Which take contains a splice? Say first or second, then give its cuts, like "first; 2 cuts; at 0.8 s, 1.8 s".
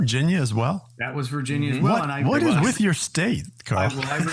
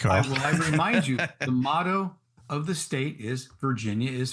first; 1 cut; at 0.9 s